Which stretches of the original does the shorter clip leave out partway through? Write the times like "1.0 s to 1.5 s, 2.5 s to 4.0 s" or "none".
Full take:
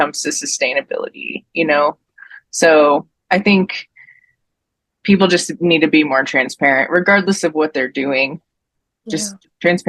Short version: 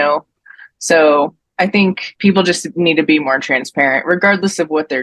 3.8 s to 4.9 s